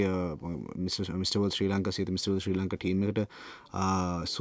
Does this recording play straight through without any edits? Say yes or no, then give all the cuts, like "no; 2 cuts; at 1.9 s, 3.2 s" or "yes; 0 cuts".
yes; 0 cuts